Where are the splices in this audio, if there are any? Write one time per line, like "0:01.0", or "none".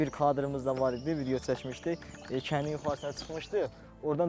none